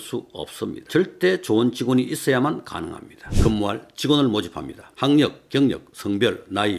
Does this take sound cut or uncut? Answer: cut